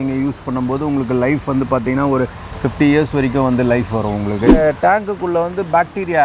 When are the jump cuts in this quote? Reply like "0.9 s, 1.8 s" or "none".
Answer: 4.5 s